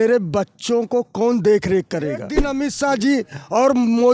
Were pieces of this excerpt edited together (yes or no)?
yes